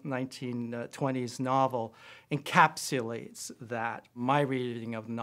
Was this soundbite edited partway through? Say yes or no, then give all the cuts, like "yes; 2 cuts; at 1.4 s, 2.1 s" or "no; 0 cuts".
yes; 1 cut; at 4.2 s